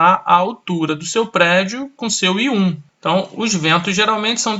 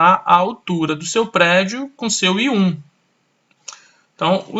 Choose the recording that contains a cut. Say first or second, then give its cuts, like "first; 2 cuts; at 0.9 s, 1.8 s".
first; 1 cut; at 2.9 s